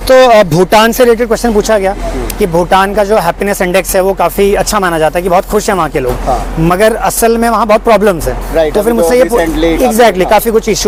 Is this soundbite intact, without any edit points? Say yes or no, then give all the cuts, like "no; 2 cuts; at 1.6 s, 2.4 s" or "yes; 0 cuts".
yes; 0 cuts